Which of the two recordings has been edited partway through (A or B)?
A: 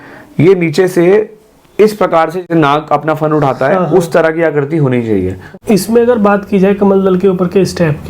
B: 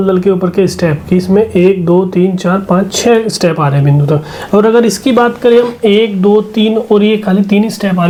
A